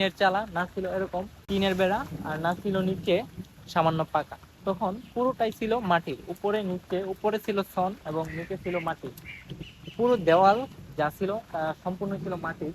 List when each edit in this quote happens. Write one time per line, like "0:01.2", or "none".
0:01.4